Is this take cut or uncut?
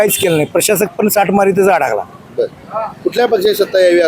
uncut